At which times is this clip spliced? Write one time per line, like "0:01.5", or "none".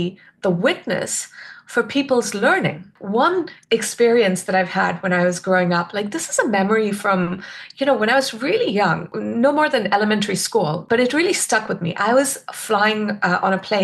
0:02.9
0:09.2
0:10.8